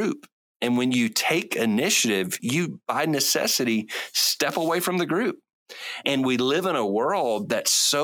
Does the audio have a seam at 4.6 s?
no; 2 cuts; at 2.4 s, 6.0 s

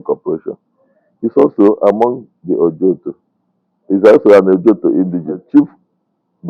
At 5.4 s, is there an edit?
yes; 1 cut; at 5.4 s

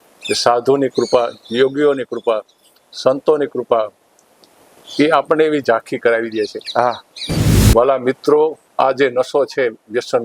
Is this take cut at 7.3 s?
yes; 1 cut; at 7.3 s

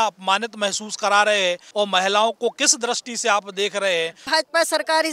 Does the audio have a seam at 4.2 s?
yes; 2 cuts; at 1.6 s, 4.2 s

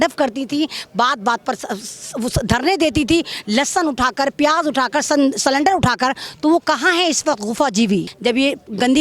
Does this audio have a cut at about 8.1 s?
yes; 1 cut; at 8.1 s

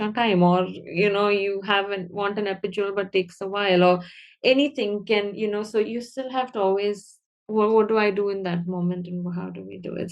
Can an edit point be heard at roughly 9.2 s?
no; 0 cuts

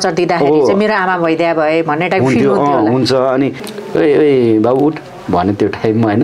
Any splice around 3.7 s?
yes; 1 cut; at 3.7 s

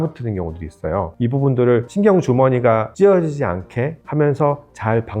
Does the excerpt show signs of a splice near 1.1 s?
yes; 4 cuts; at 1.1 s, 1.9 s, 2.9 s, 4.0 s

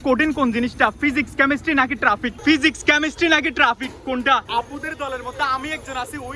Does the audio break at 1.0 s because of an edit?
no; 2 cuts; at 2.4 s, 4.5 s

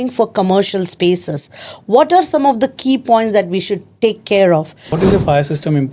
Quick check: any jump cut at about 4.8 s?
yes; 1 cut; at 4.8 s

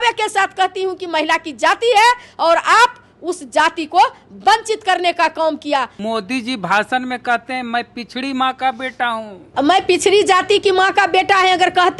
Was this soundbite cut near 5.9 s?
yes; 1 cut; at 5.9 s

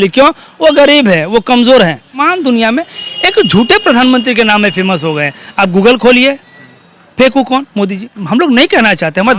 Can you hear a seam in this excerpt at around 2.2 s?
yes; 1 cut; at 2.2 s

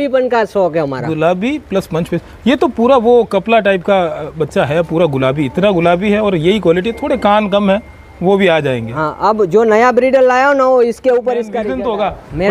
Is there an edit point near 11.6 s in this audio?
yes; 1 cut; at 11.6 s

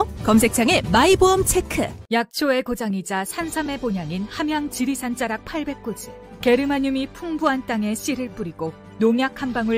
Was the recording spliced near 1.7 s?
yes; 1 cut; at 1.7 s

